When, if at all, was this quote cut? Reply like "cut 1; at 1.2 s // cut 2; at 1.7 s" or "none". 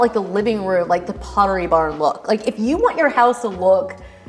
none